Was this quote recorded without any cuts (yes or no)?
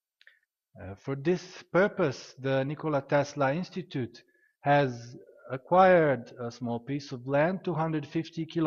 yes